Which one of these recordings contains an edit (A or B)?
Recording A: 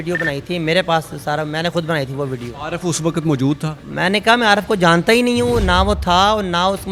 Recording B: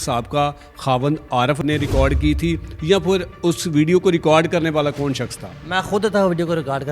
B